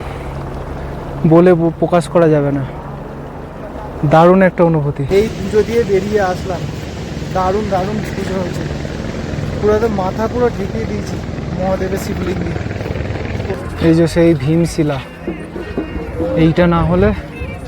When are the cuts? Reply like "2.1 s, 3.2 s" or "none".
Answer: 5.0 s, 13.5 s